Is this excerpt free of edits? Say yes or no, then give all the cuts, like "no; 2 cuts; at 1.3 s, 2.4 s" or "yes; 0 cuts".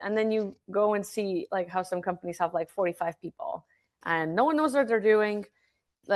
yes; 0 cuts